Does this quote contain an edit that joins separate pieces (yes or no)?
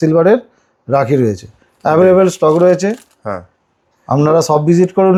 no